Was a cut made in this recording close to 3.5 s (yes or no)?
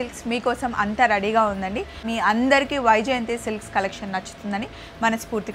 no